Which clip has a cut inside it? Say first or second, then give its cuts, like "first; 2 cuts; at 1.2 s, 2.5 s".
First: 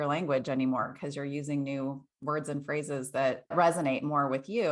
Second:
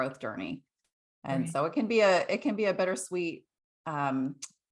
first; 1 cut; at 3.5 s